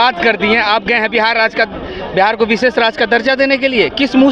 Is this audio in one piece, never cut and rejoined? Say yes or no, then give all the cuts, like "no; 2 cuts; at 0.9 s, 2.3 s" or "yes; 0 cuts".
yes; 0 cuts